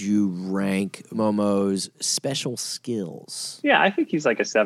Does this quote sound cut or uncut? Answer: cut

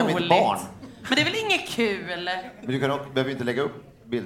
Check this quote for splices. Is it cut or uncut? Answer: uncut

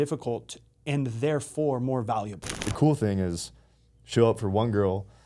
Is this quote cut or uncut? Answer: cut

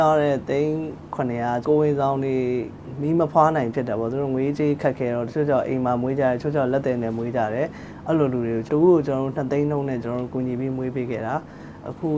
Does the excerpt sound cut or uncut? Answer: cut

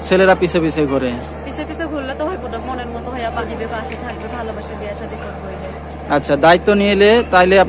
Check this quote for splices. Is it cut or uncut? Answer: cut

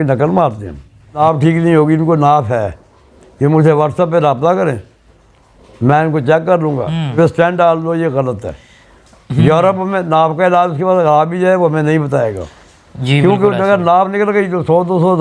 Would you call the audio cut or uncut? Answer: cut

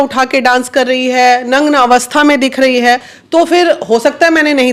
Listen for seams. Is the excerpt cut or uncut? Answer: uncut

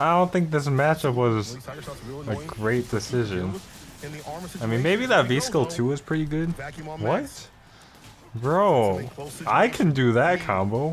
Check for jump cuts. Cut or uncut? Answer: uncut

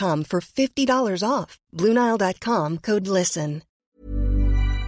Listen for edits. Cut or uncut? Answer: cut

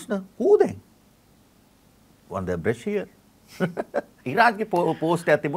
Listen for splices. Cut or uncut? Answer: cut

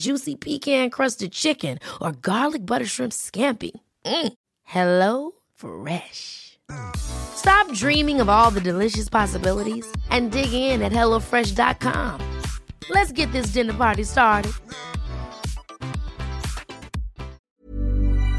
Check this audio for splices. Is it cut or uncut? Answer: cut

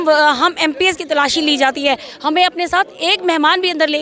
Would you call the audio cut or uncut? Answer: uncut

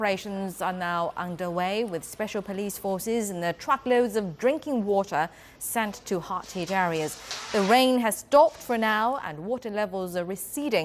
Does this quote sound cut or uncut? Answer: cut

